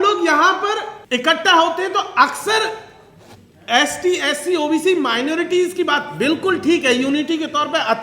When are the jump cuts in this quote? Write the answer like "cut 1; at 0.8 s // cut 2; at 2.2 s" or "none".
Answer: cut 1; at 0.9 s